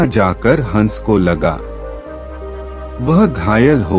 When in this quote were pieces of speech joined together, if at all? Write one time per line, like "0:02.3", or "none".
0:01.6
0:02.9